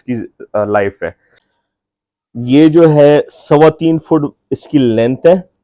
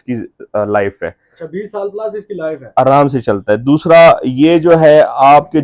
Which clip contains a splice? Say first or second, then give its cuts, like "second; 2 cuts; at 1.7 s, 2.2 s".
first; 1 cut; at 1.4 s